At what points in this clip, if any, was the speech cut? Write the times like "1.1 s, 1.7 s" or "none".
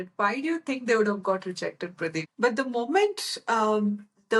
2.2 s